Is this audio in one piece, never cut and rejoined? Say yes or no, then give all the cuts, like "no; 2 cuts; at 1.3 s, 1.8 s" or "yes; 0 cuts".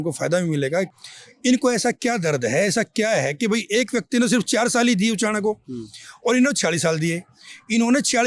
no; 1 cut; at 0.9 s